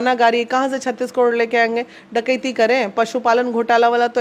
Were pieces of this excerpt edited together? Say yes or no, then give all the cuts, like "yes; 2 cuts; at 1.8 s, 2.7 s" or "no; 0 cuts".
no; 0 cuts